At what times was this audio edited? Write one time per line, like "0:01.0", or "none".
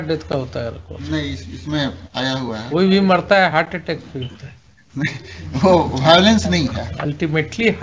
none